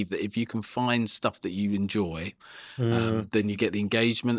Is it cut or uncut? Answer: uncut